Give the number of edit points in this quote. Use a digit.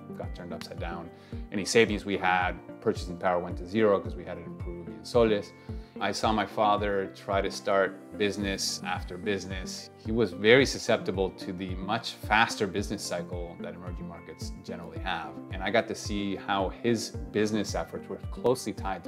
2